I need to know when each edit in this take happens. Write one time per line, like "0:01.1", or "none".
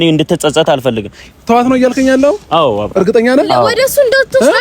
0:01.2